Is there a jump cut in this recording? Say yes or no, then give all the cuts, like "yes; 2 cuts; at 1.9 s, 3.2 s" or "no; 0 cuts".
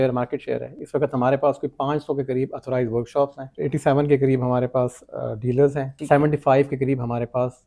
yes; 2 cuts; at 3.5 s, 5.9 s